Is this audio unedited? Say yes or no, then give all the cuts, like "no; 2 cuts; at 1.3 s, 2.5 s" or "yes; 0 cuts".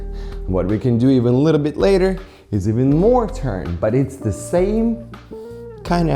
yes; 0 cuts